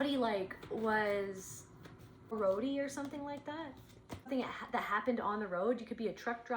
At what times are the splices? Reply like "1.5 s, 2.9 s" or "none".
2.3 s, 4.3 s